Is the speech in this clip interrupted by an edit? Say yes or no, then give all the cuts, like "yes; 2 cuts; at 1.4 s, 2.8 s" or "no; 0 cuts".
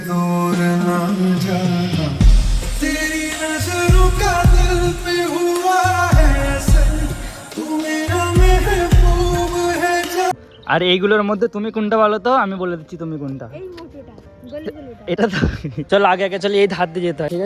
yes; 2 cuts; at 10.3 s, 15.8 s